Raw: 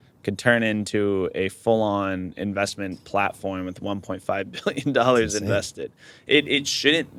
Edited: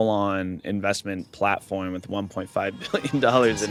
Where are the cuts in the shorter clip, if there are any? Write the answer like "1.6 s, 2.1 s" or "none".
none